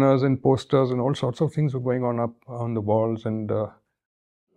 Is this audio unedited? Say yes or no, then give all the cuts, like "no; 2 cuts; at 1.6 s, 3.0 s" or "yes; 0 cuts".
yes; 0 cuts